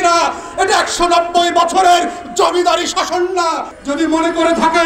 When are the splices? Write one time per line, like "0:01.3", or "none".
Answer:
0:03.7